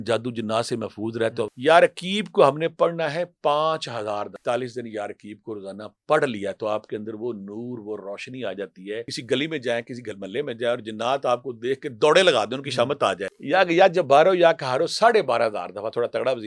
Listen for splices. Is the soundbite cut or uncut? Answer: cut